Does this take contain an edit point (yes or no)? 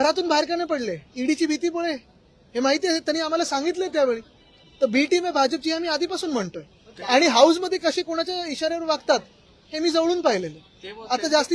no